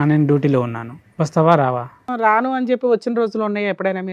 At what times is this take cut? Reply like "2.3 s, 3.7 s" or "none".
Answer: 2.1 s